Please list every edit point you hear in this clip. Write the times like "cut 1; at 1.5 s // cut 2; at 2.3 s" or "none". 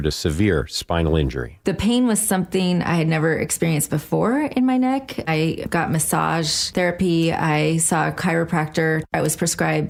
none

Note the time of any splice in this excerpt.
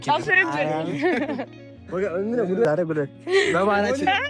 cut 1; at 2.6 s

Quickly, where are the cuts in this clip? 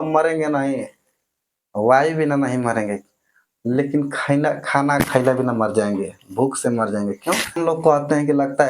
cut 1; at 7.6 s

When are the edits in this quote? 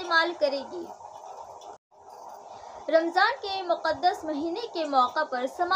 cut 1; at 1.9 s

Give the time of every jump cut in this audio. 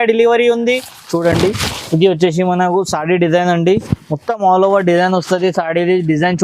cut 1; at 0.9 s

